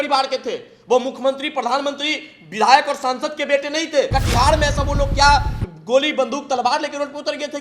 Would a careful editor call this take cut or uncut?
cut